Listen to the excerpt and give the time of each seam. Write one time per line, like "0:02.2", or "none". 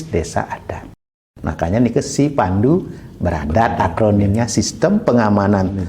0:01.3